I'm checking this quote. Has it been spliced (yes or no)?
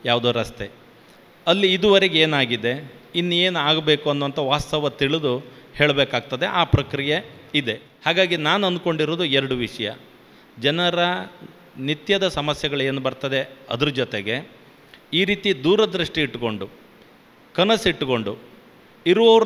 yes